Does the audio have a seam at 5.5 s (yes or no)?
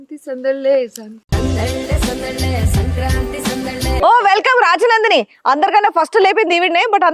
no